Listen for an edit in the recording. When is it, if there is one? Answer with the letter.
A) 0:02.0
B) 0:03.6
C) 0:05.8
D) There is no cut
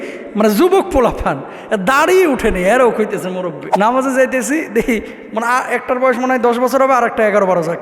B